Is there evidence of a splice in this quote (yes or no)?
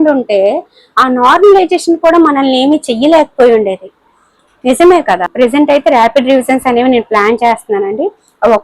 yes